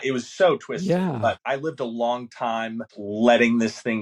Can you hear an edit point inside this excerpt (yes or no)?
yes